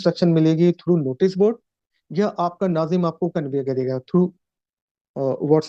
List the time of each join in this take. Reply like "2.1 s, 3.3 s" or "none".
none